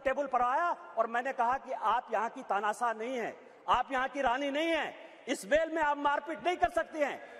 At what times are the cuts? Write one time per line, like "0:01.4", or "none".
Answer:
none